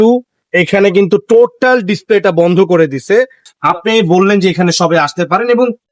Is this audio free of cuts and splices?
no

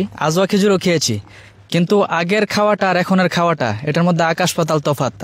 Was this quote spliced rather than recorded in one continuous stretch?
no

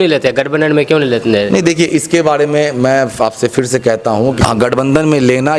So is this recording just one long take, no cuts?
yes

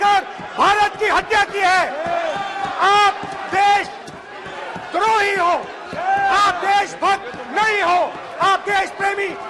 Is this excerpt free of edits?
yes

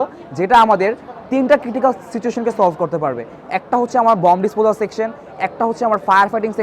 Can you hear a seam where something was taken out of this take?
no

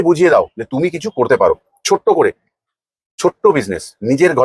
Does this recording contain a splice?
no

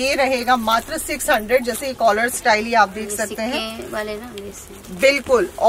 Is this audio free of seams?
yes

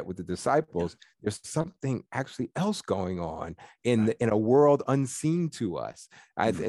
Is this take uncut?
yes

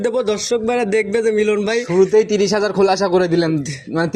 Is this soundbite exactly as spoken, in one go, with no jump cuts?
yes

